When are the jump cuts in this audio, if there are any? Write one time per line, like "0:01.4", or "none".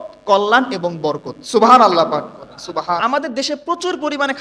0:03.0